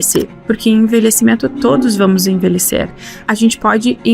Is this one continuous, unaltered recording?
no; 1 cut; at 3.2 s

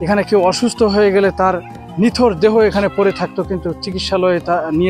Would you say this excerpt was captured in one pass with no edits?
yes; 0 cuts

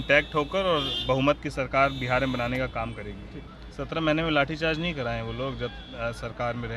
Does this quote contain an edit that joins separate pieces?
yes; 1 cut; at 3.3 s

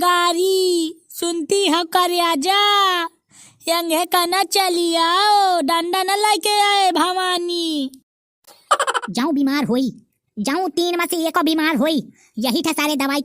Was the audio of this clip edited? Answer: yes; 1 cut; at 9.0 s

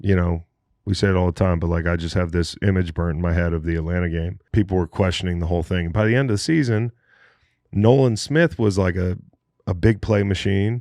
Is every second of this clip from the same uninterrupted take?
no; 1 cut; at 4.4 s

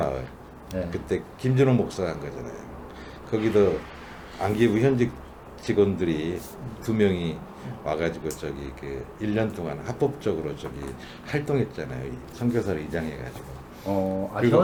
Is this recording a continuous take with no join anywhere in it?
yes; 0 cuts

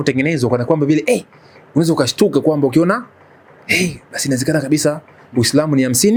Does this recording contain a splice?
no; 0 cuts

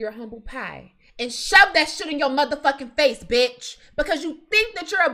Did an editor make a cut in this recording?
no; 0 cuts

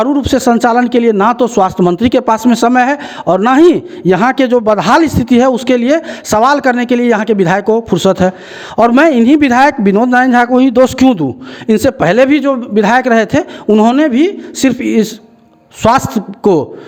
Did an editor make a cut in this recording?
no; 0 cuts

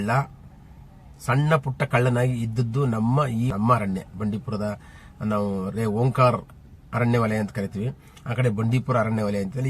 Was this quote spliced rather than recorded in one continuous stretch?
yes; 1 cut; at 3.5 s

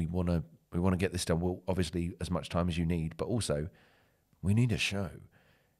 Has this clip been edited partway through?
no; 0 cuts

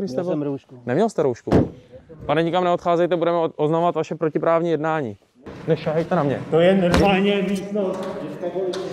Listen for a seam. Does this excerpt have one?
yes; 1 cut; at 5.5 s

